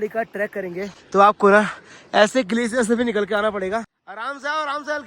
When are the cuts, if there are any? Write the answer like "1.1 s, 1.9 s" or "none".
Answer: 1.0 s, 4.0 s